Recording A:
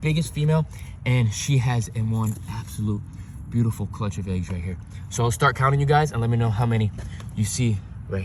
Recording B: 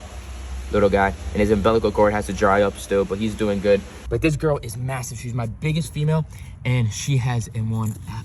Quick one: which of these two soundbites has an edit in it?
B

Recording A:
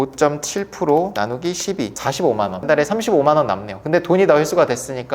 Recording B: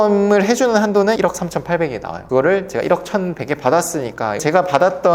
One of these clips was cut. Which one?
B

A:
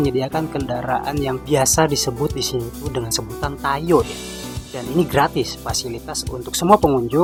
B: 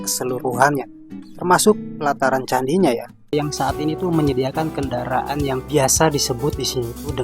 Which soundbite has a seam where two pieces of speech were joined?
B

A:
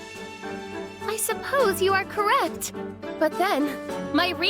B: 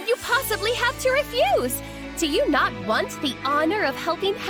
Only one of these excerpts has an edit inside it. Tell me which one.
A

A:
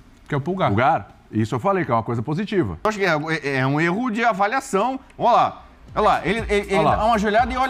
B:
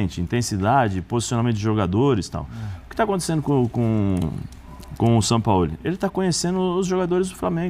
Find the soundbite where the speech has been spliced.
A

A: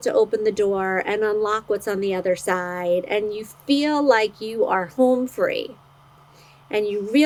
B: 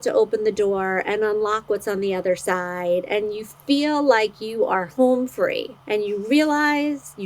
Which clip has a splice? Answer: B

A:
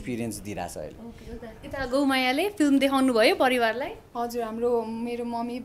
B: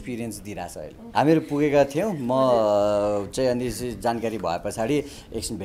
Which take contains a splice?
B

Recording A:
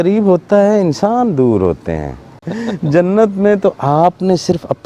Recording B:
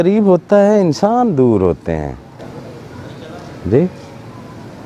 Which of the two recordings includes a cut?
A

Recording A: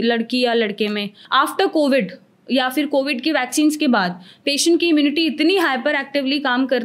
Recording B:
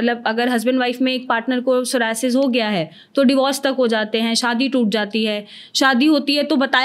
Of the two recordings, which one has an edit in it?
A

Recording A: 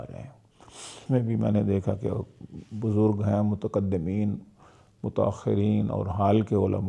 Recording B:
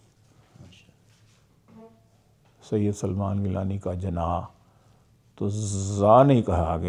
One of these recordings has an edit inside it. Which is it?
A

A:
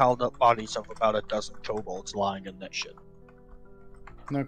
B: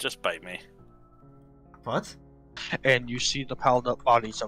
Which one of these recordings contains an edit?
B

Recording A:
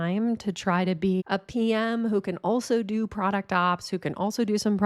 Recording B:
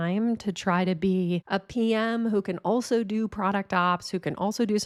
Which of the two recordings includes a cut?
A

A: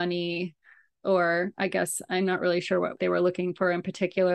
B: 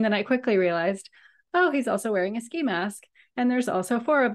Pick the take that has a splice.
A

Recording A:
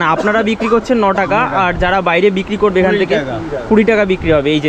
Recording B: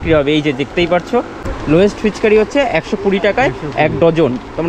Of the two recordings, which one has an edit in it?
B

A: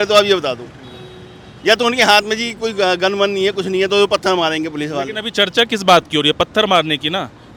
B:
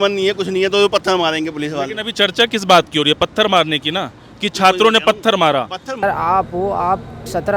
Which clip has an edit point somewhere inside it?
B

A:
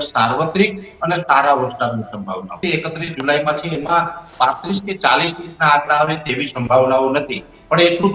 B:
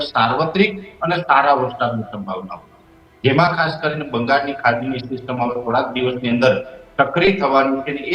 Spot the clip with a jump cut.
A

